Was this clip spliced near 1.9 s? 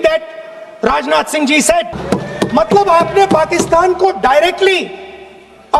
yes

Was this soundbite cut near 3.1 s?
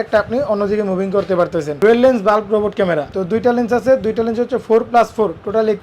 yes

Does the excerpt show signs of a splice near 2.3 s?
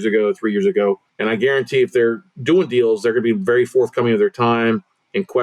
no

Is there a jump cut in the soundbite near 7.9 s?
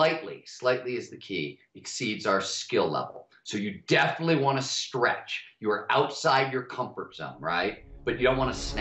yes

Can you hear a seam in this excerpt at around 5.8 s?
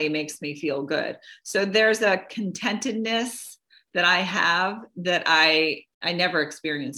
yes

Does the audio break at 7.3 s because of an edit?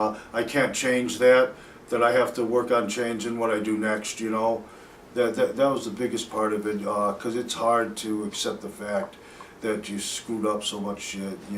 yes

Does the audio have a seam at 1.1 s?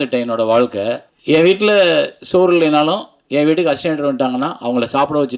yes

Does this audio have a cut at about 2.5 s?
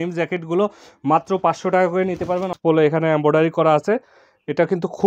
yes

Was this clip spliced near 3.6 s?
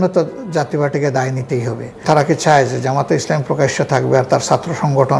no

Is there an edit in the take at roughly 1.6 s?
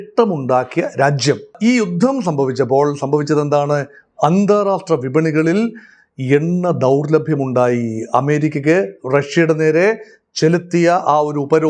yes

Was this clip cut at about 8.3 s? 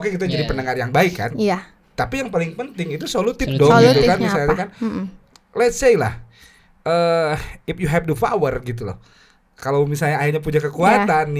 no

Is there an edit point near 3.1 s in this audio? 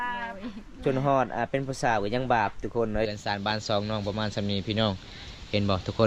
yes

